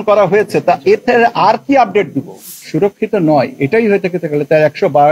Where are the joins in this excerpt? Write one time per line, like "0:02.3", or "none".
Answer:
0:02.5